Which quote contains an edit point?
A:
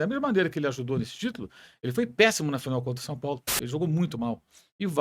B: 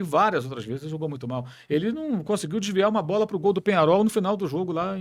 A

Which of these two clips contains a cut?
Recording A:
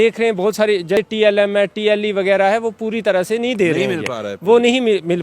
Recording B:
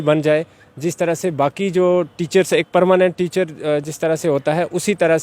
A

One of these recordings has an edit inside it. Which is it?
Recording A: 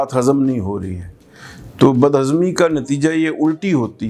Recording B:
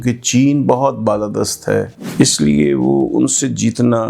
B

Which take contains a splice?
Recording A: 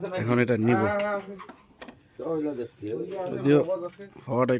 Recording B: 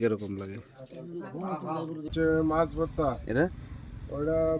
B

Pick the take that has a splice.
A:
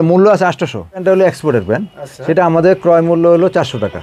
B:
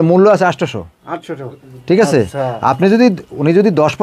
A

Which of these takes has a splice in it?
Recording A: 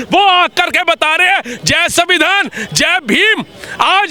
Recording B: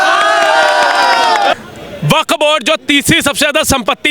B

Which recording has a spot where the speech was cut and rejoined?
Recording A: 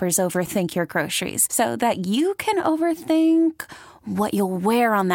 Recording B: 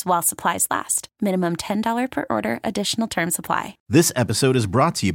B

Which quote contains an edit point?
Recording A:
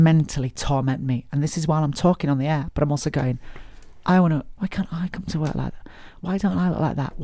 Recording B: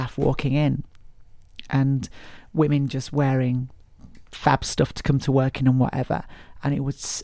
A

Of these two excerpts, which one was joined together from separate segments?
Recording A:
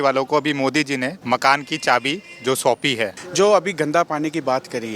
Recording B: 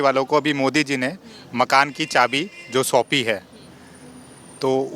A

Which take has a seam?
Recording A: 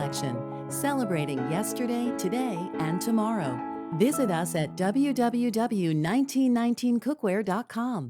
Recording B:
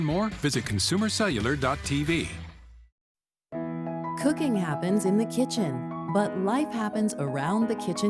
B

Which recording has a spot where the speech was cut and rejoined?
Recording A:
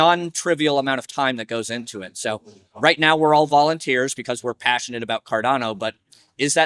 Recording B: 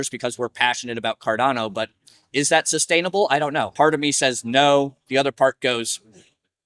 B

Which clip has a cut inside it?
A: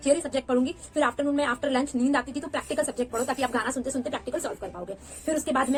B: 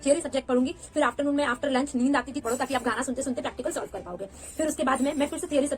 B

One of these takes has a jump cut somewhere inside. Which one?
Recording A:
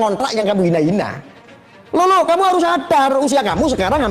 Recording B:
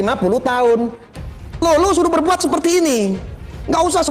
B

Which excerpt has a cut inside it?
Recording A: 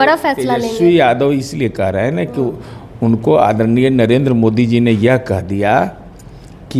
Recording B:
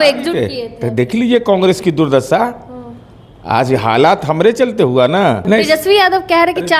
B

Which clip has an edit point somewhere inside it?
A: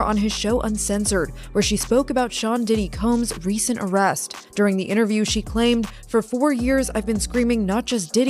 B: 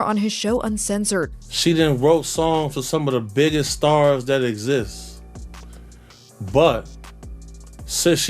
B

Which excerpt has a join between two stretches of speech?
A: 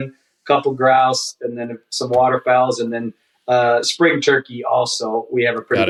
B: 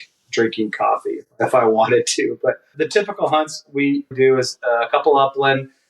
B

